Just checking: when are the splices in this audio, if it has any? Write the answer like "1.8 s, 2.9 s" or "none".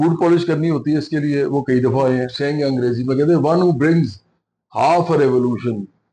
2.3 s